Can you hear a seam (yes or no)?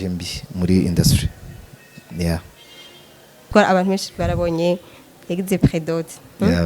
yes